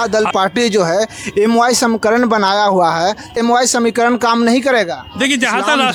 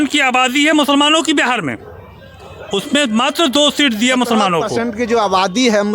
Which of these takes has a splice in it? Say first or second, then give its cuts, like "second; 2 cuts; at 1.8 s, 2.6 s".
second; 1 cut; at 4.7 s